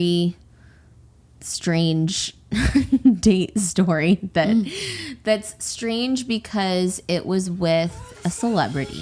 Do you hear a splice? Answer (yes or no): no